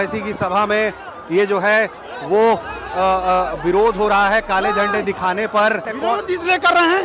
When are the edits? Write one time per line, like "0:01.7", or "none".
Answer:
0:05.9